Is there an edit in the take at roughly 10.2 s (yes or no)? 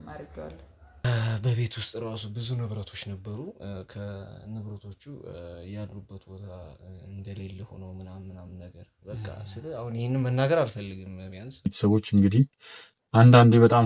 no